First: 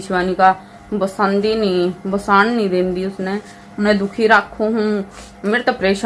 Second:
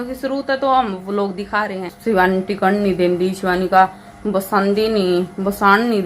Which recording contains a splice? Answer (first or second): second